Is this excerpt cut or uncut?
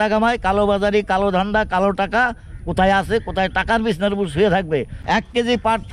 cut